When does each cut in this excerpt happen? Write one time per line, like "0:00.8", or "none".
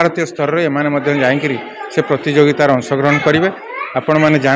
none